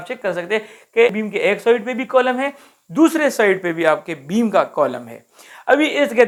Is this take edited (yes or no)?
no